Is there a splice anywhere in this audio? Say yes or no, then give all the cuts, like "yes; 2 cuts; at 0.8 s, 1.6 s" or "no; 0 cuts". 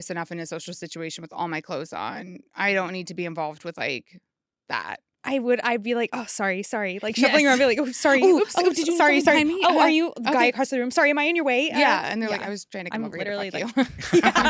no; 0 cuts